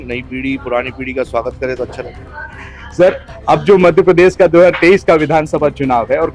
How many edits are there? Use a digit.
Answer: 0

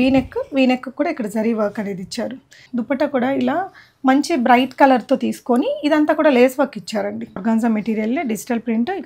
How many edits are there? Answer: 2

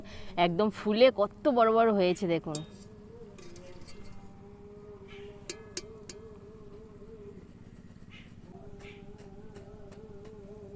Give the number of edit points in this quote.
1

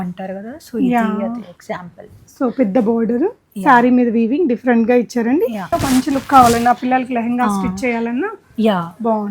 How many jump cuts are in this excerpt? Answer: 1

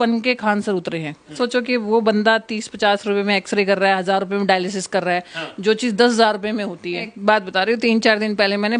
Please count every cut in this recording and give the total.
2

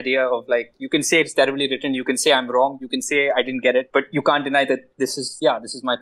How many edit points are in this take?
0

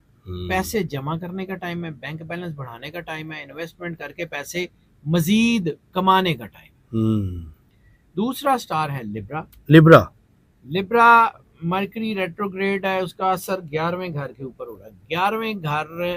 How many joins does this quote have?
0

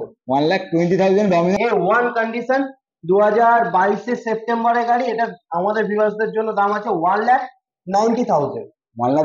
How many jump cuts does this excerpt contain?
1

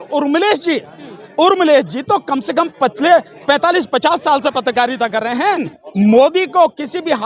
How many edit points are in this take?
1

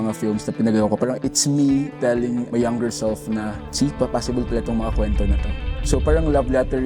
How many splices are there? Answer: 3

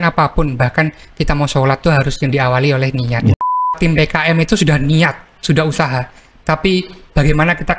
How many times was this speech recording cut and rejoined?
1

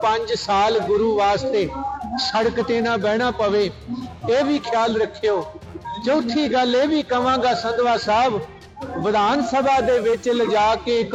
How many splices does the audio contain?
0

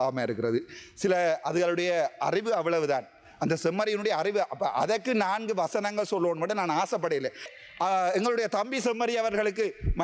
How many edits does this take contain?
1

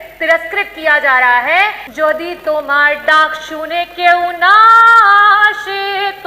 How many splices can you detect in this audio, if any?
1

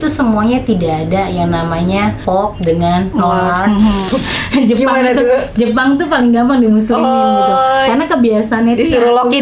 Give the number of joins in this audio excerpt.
3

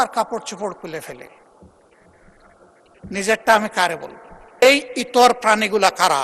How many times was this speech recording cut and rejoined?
1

